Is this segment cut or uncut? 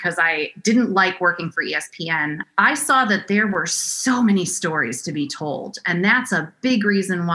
cut